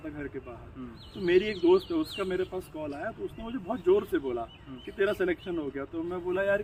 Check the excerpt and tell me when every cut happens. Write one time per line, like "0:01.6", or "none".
none